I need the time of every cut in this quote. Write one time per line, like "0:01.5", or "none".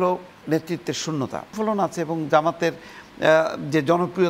0:01.5